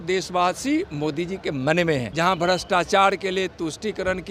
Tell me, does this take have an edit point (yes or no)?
yes